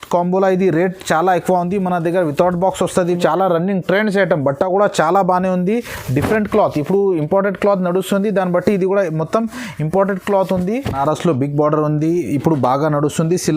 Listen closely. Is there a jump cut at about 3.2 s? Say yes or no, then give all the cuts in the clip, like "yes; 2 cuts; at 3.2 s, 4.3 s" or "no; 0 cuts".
yes; 2 cuts; at 3.2 s, 11.0 s